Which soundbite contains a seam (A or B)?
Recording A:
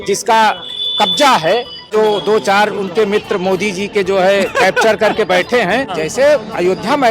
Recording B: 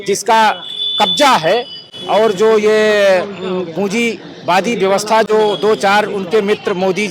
A